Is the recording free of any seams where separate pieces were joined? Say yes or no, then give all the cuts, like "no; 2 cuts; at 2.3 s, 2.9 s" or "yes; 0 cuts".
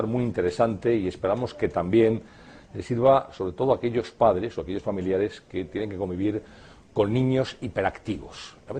yes; 0 cuts